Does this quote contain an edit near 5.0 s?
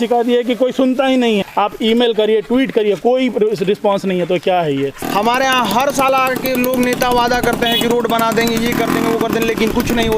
yes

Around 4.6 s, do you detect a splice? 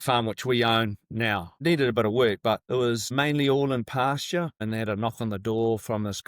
yes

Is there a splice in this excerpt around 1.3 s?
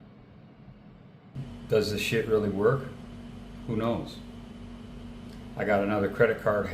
yes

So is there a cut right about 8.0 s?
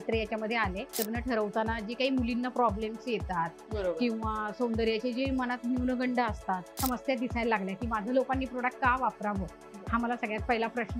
no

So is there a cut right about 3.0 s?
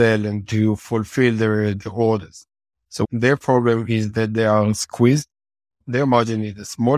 yes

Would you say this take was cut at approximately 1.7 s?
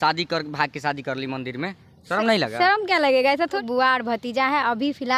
no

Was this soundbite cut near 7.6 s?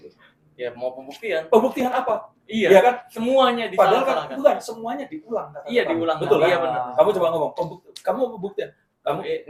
no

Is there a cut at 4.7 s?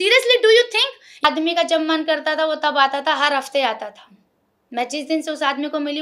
no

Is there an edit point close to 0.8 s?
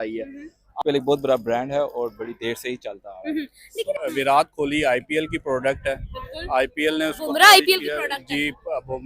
yes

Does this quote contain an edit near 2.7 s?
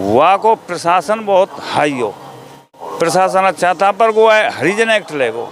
yes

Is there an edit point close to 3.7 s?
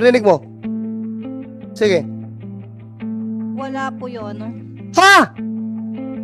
yes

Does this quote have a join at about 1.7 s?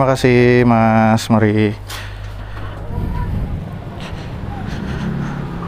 no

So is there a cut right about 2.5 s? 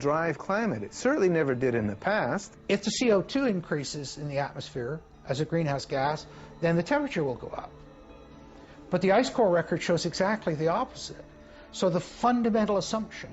yes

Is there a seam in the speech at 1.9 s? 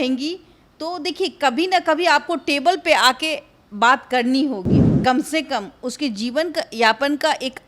no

